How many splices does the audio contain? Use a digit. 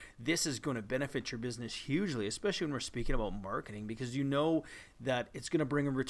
0